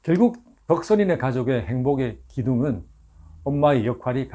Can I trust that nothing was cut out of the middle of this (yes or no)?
yes